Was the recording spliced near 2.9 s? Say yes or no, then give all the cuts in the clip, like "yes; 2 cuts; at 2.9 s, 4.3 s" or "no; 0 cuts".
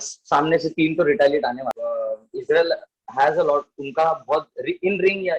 no; 1 cut; at 1.7 s